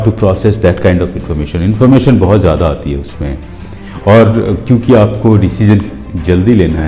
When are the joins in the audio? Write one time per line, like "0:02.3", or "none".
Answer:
none